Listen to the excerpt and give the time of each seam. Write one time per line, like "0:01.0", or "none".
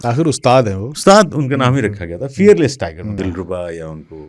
0:03.1